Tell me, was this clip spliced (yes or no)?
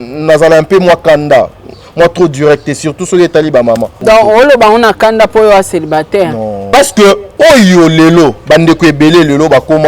yes